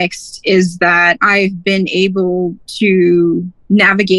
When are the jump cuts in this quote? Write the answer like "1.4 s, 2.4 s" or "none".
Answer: 1.2 s, 2.6 s